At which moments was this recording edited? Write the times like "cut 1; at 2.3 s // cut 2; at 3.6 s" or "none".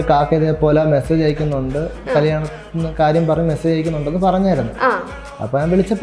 none